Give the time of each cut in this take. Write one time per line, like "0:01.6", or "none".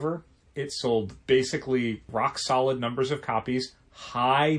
0:01.1
0:02.0